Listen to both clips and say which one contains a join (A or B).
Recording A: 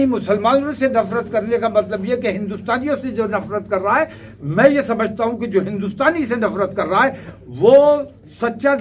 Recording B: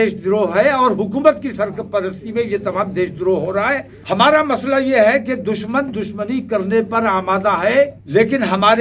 B